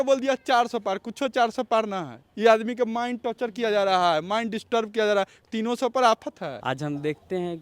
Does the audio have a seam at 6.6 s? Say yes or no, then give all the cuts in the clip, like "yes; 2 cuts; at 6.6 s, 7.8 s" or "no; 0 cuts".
yes; 1 cut; at 6.6 s